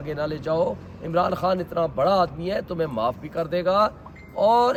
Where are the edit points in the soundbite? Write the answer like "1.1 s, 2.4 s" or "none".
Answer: none